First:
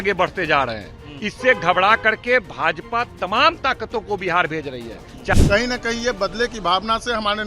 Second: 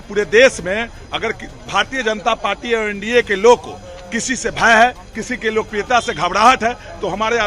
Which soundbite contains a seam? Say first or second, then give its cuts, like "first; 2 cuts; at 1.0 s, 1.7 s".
first; 1 cut; at 5.3 s